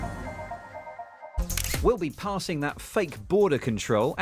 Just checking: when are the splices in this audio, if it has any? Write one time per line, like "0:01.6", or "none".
none